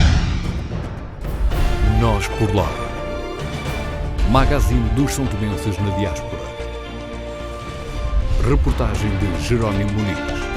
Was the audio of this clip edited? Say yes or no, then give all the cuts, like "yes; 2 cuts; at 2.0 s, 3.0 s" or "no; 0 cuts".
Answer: yes; 1 cut; at 1.3 s